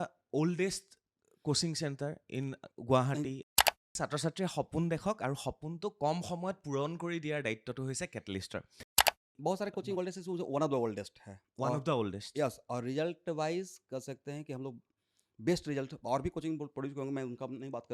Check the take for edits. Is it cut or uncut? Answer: cut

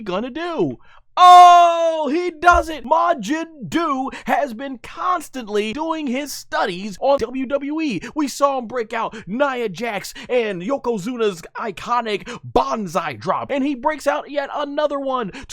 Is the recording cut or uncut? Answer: cut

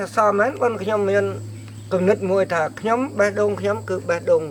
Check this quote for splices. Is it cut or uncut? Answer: uncut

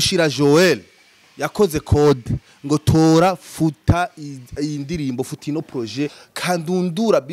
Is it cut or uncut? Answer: cut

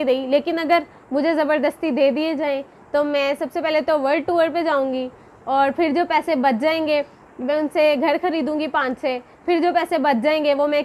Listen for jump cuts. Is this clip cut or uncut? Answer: uncut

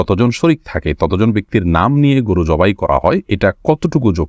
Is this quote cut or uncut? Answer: cut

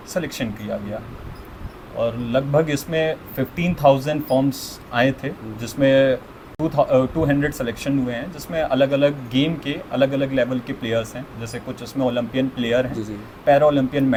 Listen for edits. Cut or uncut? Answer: uncut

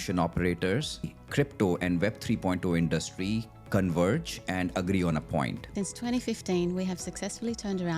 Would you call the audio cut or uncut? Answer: cut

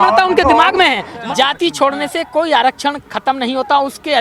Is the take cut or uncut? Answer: cut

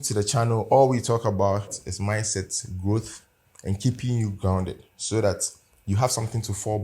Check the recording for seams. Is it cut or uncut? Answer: cut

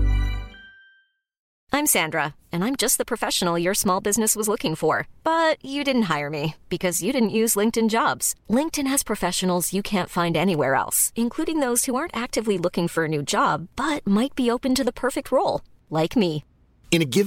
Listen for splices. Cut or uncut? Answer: cut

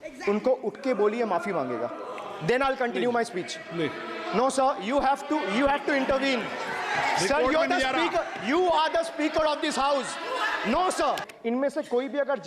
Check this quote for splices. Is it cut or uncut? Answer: cut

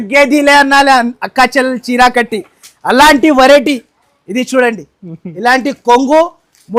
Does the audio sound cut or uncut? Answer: uncut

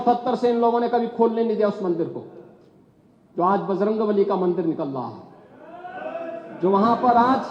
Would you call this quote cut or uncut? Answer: uncut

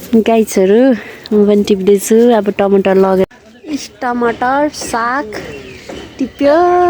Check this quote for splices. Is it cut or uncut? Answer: cut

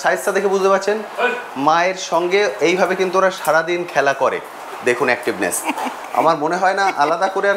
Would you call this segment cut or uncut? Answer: uncut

